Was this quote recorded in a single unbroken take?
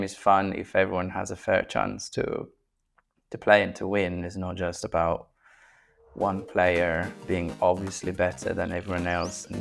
yes; 0 cuts

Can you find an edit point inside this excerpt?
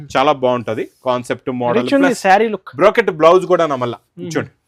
no; 0 cuts

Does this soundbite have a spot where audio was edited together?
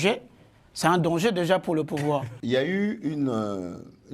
yes; 1 cut; at 2.3 s

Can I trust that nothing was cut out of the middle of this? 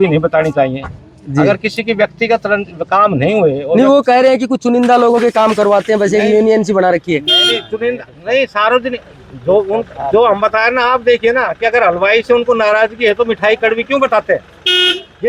yes; 0 cuts

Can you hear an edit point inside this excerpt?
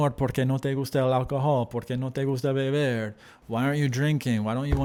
no; 0 cuts

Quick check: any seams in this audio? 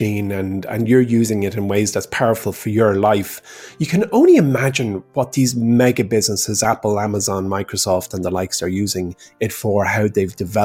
no; 0 cuts

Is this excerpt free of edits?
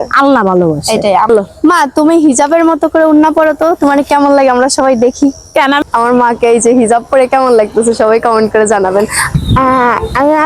no; 3 cuts; at 1.3 s, 5.8 s, 9.3 s

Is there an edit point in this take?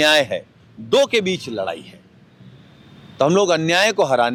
no; 0 cuts

